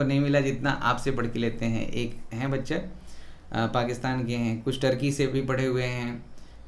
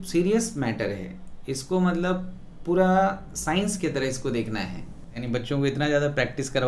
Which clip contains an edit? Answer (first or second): second